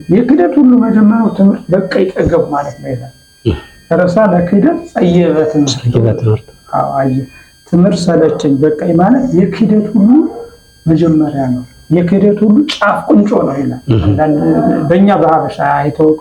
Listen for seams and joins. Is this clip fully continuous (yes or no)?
yes